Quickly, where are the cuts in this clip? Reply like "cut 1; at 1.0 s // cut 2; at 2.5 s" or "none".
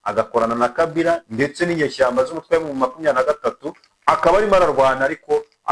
none

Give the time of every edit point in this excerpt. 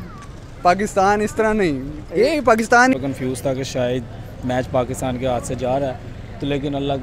cut 1; at 2.9 s

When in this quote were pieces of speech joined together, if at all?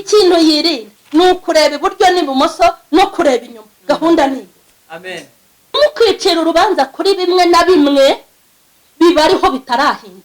cut 1; at 5.8 s

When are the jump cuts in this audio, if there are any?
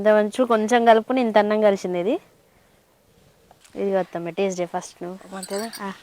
cut 1; at 3.6 s

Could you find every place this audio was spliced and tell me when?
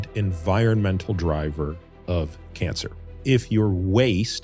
cut 1; at 3.2 s

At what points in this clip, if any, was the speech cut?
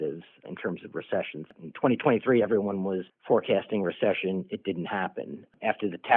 cut 1; at 3.1 s

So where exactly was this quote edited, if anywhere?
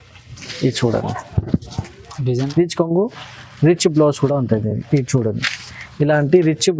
cut 1; at 2.5 s

